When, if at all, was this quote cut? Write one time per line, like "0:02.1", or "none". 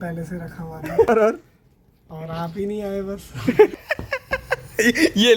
0:01.1
0:03.7